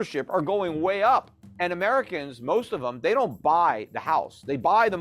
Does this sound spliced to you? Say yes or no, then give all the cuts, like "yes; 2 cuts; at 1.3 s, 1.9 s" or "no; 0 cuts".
yes; 1 cut; at 1.4 s